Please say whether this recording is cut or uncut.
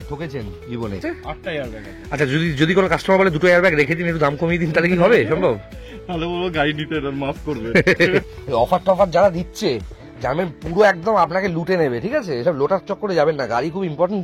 cut